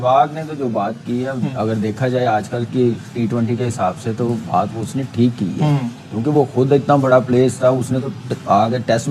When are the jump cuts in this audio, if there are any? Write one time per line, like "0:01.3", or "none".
none